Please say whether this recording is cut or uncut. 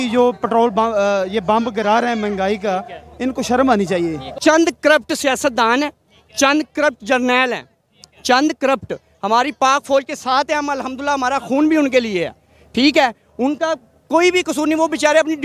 cut